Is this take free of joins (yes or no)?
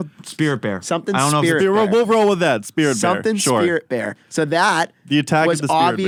yes